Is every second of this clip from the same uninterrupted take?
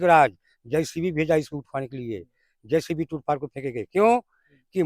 yes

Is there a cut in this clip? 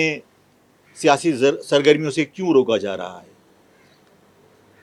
no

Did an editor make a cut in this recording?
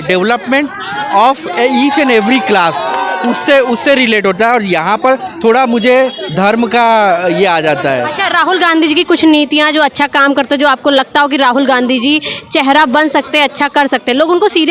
no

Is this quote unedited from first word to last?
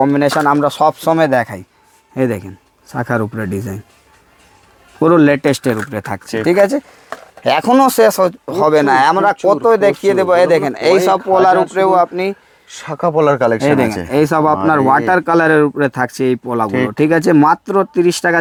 yes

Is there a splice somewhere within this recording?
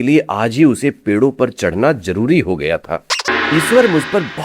yes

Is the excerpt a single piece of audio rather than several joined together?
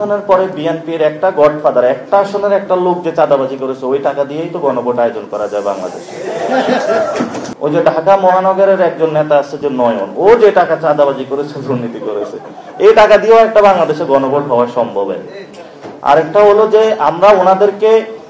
no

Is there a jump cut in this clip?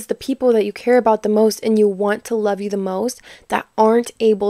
no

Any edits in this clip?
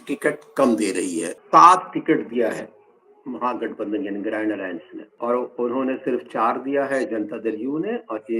yes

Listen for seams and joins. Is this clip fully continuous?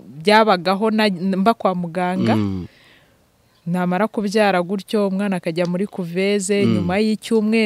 yes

